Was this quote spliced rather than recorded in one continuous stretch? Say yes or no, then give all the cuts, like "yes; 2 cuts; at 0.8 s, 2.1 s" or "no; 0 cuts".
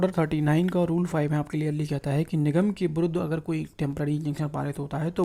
no; 0 cuts